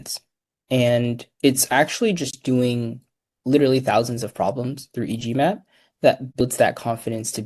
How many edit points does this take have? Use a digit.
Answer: 1